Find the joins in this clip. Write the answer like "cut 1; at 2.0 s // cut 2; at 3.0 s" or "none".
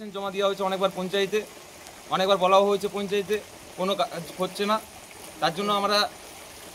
none